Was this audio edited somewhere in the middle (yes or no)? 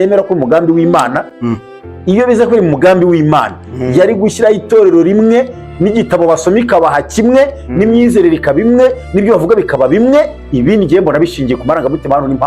no